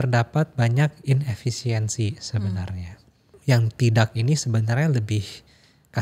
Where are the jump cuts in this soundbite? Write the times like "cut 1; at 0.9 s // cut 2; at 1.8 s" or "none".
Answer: cut 1; at 3.3 s

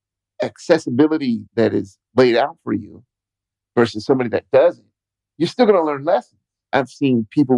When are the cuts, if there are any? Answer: cut 1; at 6.5 s

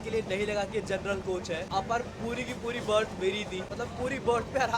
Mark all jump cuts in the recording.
cut 1; at 3.7 s

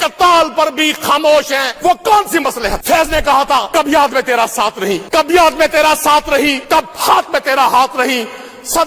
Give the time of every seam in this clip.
cut 1; at 1.7 s // cut 2; at 2.8 s // cut 3; at 3.7 s // cut 4; at 5.0 s // cut 5; at 6.6 s

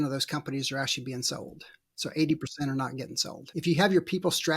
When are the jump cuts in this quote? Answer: cut 1; at 3.3 s

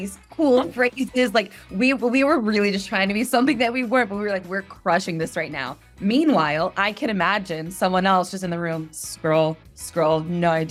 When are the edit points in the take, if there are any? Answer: none

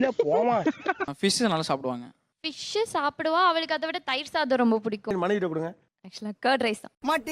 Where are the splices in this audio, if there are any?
cut 1; at 1.0 s

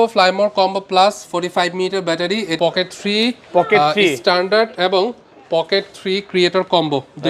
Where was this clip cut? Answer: cut 1; at 2.5 s

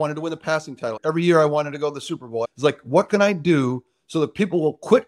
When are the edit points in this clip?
cut 1; at 1.0 s // cut 2; at 2.5 s

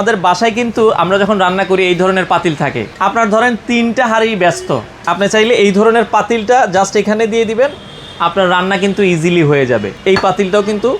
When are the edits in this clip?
cut 1; at 2.9 s // cut 2; at 9.9 s

